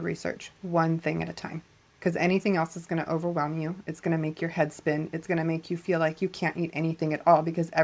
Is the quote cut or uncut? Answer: uncut